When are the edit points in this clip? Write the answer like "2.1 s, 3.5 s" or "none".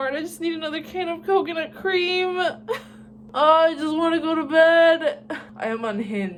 none